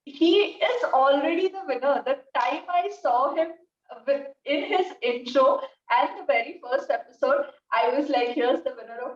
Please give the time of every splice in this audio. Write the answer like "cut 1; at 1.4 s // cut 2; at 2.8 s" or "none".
none